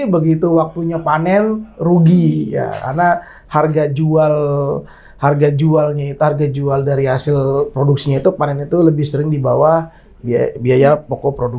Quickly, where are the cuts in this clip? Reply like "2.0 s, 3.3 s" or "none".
none